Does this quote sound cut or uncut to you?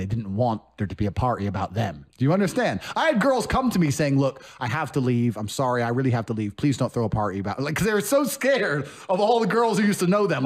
uncut